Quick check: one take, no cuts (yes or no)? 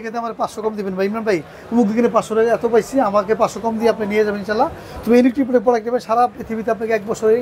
yes